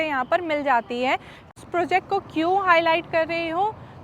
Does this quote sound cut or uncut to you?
cut